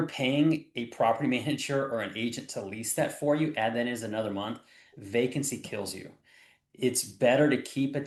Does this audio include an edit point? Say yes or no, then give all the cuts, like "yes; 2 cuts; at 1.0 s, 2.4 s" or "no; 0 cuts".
no; 0 cuts